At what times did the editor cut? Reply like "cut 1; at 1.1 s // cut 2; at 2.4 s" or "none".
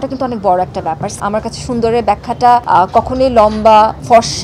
cut 1; at 1.1 s